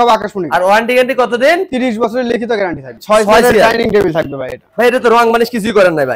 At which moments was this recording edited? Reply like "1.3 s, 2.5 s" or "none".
3.0 s